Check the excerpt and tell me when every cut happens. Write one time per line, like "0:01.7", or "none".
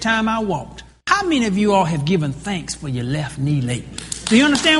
0:01.0

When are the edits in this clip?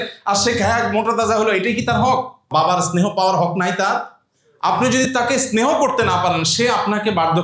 0:02.4

